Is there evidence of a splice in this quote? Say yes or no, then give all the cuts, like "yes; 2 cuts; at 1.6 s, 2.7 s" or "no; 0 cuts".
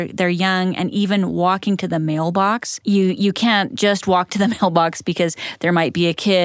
yes; 1 cut; at 2.7 s